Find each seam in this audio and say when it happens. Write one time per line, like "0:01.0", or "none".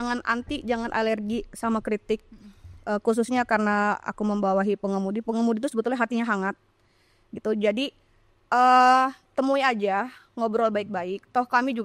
none